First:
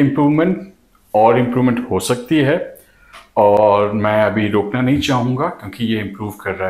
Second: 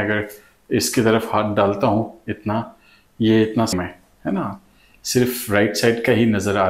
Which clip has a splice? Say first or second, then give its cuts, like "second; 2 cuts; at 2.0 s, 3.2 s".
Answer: second; 1 cut; at 3.7 s